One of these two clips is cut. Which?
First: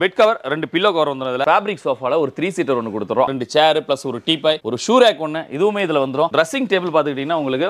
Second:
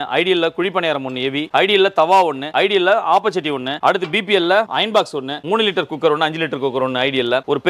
first; 3 cuts; at 1.4 s, 3.3 s, 6.3 s

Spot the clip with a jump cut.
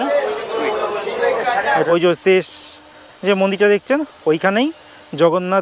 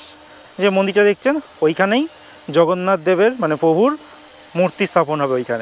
first; 1 cut; at 1.7 s

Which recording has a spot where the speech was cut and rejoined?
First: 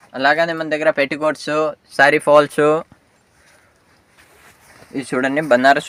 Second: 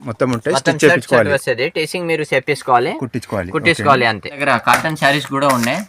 second; 1 cut; at 4.4 s

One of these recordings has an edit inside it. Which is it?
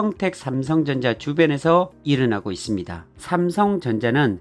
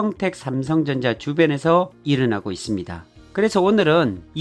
first; 1 cut; at 3.2 s

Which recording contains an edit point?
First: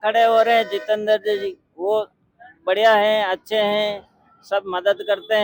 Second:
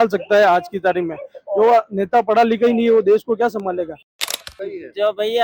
second; 1 cut; at 4.2 s

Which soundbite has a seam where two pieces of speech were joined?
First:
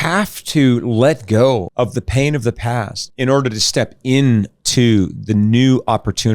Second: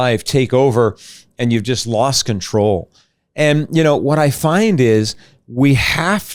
first; 2 cuts; at 1.7 s, 3.0 s

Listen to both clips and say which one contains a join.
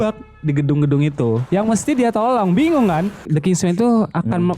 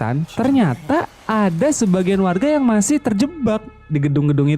first; 1 cut; at 3.3 s

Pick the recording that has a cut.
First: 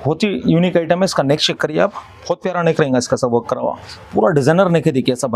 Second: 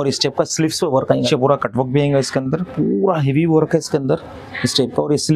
second; 1 cut; at 1.3 s

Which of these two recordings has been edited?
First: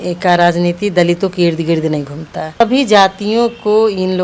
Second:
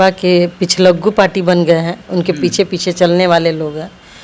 first; 1 cut; at 2.6 s

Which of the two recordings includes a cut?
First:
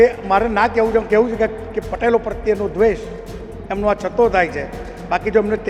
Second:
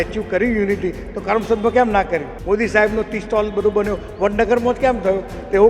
second; 1 cut; at 2.3 s

